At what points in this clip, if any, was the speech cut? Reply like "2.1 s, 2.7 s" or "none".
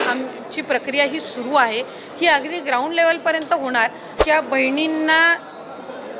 4.1 s